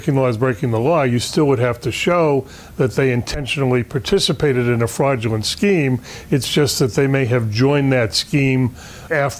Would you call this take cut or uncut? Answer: uncut